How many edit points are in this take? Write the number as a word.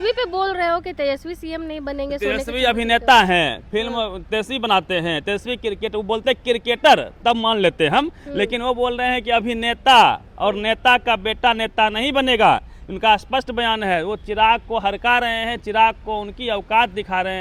zero